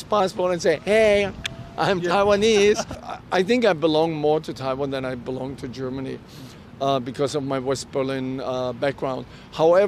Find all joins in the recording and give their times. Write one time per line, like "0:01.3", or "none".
0:03.0